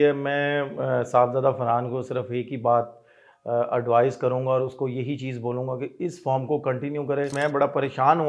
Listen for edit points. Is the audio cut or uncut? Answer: cut